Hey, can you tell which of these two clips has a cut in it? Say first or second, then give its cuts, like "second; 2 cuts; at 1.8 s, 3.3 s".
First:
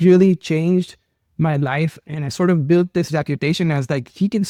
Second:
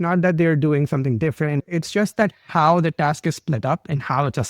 second; 1 cut; at 1.6 s